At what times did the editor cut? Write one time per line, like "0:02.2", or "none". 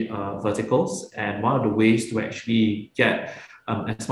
none